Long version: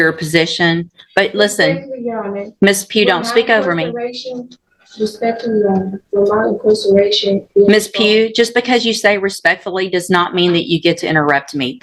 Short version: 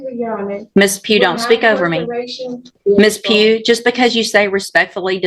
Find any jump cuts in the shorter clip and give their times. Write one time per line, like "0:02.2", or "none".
0:02.8